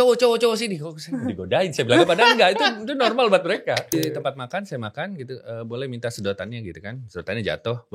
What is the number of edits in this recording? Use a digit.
1